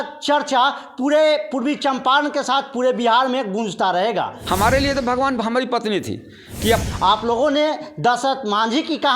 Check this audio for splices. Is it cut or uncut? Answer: cut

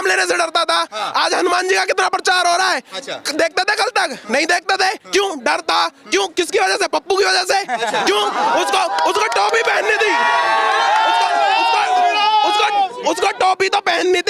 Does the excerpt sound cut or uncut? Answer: uncut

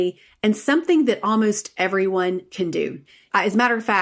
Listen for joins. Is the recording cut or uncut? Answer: cut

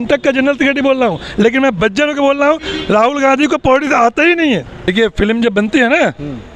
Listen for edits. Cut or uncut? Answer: cut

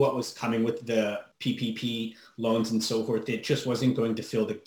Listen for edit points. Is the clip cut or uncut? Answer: cut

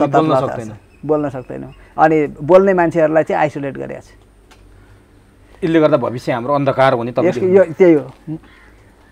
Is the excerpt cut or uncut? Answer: uncut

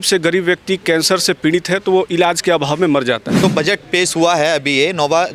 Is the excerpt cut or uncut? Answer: cut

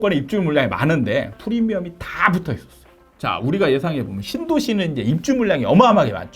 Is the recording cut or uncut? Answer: cut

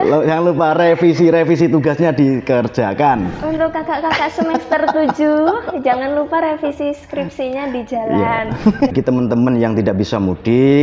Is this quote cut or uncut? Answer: cut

